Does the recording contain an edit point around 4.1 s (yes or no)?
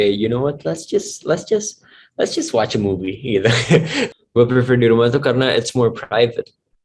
yes